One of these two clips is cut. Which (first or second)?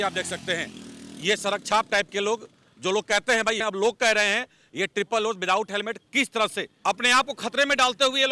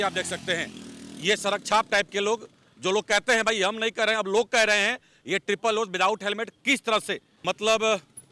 first